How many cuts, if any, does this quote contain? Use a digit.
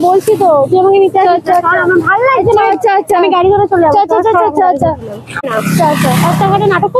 1